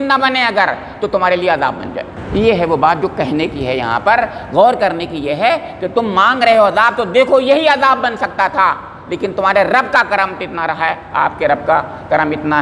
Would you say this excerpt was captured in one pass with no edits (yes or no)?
no